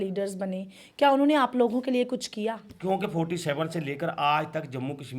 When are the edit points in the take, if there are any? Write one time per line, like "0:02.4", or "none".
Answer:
0:02.7

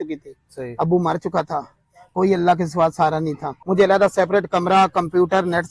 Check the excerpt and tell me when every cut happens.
0:03.5

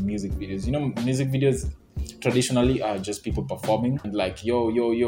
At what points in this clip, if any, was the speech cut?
0:04.1

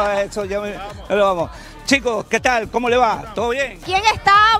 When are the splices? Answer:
none

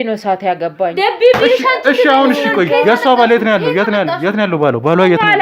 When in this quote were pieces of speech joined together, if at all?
none

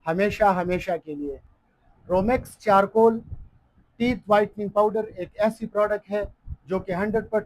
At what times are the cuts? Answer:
0:01.9

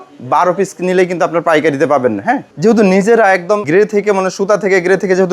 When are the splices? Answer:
0:02.5
0:03.6

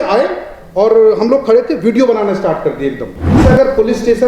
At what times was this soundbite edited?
0:03.3

